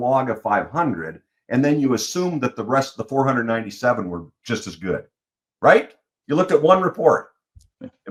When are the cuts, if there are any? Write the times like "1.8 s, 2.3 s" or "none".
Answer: none